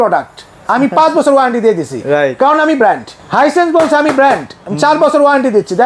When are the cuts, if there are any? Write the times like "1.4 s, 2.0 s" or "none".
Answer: 3.1 s